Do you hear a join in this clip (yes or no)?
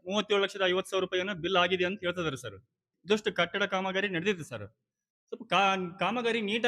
yes